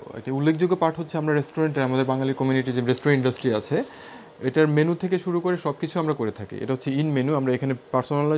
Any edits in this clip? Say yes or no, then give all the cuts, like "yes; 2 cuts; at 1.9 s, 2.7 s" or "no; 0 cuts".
no; 0 cuts